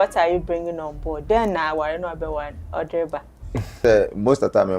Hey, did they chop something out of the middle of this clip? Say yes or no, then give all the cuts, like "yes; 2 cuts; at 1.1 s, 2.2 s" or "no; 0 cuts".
yes; 1 cut; at 3.8 s